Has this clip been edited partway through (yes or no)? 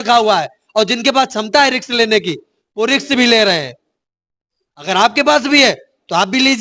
no